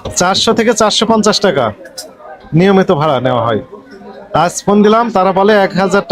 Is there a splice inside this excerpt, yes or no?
no